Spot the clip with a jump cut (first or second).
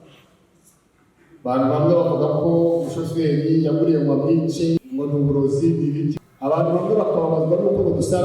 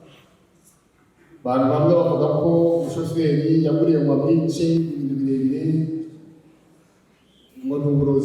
first